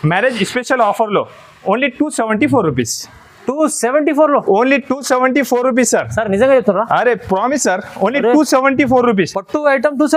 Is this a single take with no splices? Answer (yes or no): yes